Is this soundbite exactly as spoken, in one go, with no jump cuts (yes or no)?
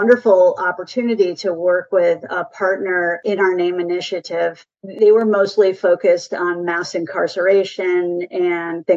yes